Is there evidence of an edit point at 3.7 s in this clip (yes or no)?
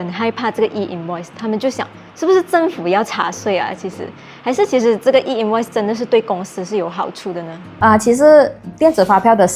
no